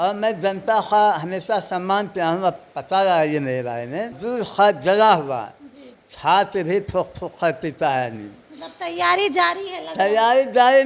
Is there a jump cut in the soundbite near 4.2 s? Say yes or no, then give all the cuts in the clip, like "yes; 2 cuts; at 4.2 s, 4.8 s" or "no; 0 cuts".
yes; 1 cut; at 4.2 s